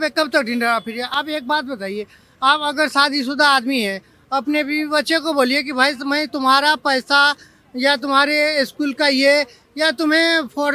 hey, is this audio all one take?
yes; 0 cuts

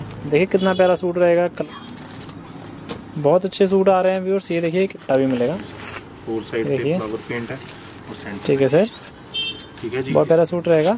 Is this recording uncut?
no; 2 cuts; at 1.6 s, 5.0 s

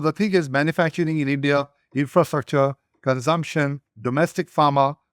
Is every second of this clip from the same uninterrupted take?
no; 1 cut; at 3.9 s

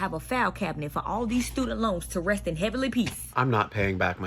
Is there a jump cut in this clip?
yes; 1 cut; at 3.2 s

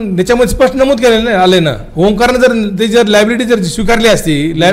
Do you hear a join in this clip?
no; 0 cuts

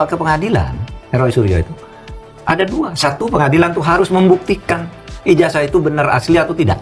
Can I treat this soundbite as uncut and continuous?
yes; 0 cuts

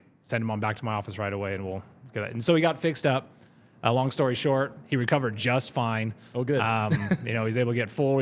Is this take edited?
no; 0 cuts

